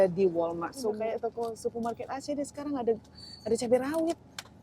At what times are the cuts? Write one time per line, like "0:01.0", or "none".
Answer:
0:01.0